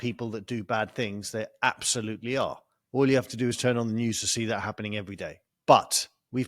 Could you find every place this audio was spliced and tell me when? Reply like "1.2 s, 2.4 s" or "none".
5.5 s